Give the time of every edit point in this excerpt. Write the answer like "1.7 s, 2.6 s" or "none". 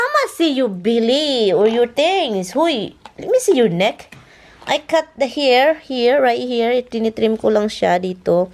none